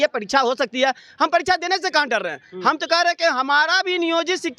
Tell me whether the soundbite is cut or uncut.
uncut